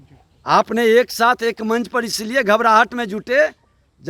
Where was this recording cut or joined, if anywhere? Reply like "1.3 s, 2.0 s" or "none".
none